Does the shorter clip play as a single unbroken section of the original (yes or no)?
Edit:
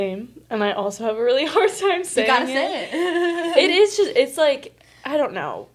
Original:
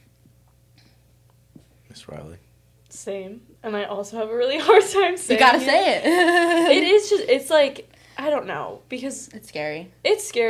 yes